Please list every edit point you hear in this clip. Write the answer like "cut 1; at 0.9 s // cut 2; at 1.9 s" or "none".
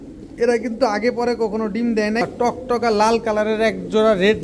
cut 1; at 2.2 s